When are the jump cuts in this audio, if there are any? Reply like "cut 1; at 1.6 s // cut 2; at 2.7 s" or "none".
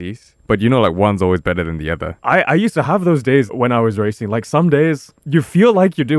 cut 1; at 2.1 s // cut 2; at 3.5 s